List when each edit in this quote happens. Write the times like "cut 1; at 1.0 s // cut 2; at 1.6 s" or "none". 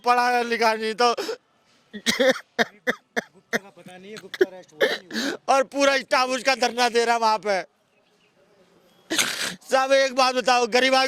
none